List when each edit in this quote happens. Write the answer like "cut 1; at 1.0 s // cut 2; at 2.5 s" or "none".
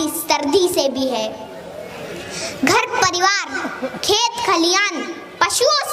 none

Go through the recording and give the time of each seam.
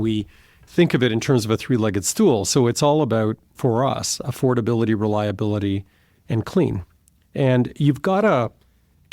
none

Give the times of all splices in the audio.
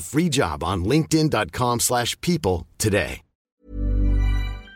cut 1; at 3.6 s

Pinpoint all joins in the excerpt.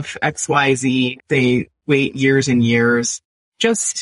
cut 1; at 1.2 s

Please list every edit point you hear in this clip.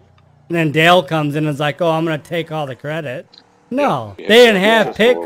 cut 1; at 4.1 s

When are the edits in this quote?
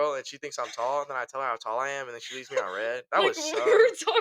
none

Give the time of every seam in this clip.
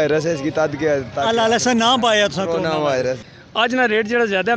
cut 1; at 3.2 s

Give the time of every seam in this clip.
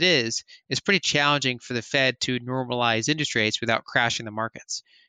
none

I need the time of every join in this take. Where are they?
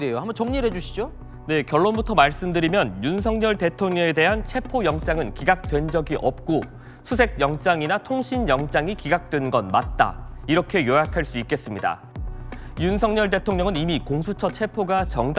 cut 1; at 12.3 s

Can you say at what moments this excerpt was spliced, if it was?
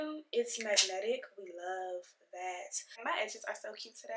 cut 1; at 3.0 s

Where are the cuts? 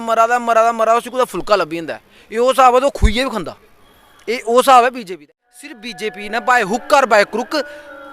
cut 1; at 5.3 s

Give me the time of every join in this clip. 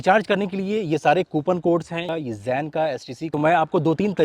cut 1; at 2.1 s // cut 2; at 3.3 s

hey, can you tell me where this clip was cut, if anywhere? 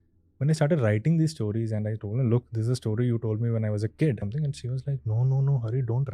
cut 1; at 4.3 s

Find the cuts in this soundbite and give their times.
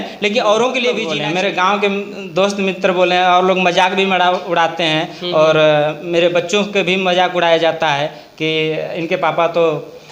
cut 1; at 1.1 s

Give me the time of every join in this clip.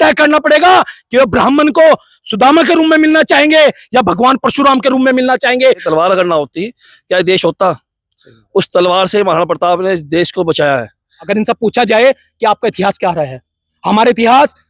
cut 1; at 5.8 s // cut 2; at 11.2 s

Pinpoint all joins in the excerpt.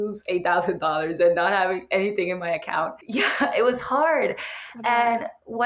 cut 1; at 3.0 s

